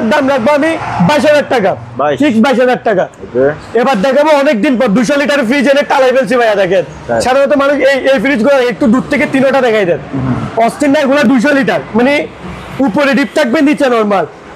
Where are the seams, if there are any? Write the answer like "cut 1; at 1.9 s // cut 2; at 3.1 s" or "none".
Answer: none